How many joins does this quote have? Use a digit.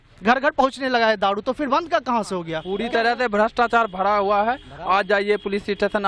1